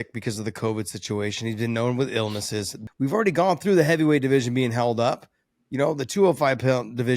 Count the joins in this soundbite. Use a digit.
1